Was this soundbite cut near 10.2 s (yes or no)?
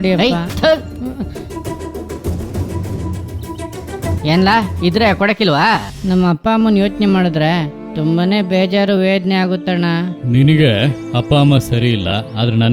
yes